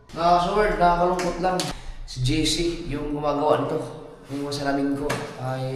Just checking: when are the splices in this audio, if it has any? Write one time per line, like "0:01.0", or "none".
0:01.7

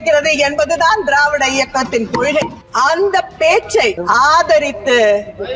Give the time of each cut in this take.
0:02.6
0:04.0

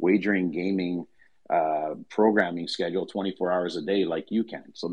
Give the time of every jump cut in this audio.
none

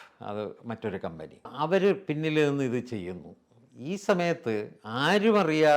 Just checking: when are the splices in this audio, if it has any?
0:01.5

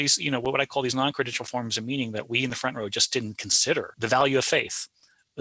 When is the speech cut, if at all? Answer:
0:03.9

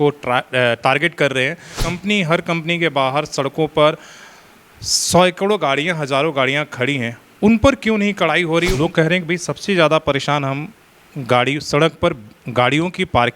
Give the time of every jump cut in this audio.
0:01.8
0:08.7

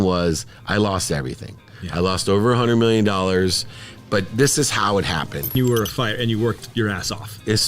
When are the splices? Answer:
0:05.5

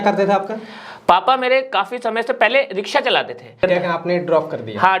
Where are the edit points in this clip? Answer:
0:03.6

